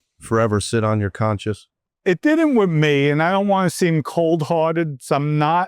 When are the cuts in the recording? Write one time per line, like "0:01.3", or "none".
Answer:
0:01.9

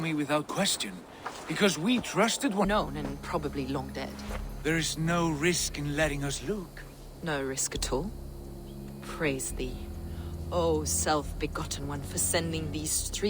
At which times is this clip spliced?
0:02.6

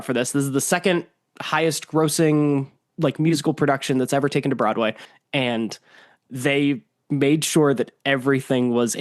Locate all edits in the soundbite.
0:05.0

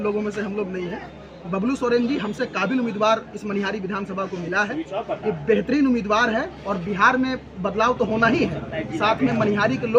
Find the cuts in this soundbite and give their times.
none

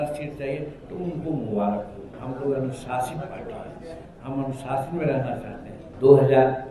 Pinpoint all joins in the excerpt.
0:02.1
0:05.8

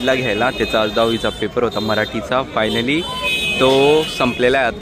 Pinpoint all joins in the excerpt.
none

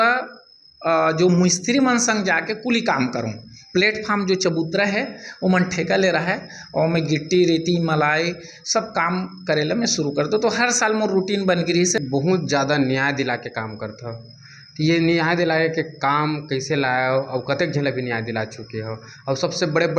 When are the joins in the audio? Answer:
0:12.0

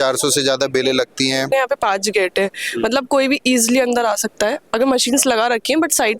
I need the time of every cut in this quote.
0:01.5

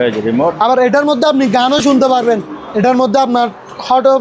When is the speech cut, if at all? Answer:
0:02.6

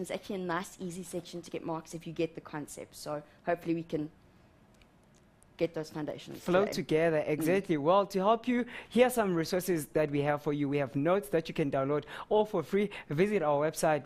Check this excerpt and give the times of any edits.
none

